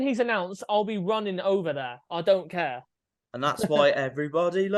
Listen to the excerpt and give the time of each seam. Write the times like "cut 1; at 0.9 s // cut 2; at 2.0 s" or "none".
none